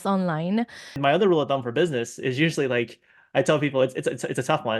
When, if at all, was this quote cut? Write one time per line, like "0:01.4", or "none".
0:01.0